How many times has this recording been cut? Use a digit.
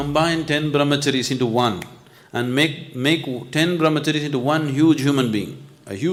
0